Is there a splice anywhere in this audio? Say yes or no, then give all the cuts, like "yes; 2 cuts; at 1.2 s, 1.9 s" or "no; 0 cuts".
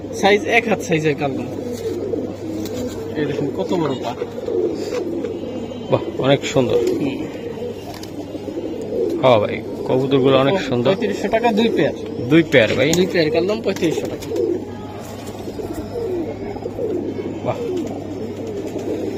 no; 0 cuts